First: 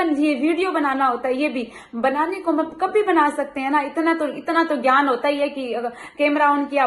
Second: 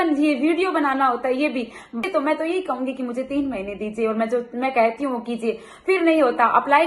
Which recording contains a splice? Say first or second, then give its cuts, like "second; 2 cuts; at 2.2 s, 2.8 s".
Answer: second; 1 cut; at 2.0 s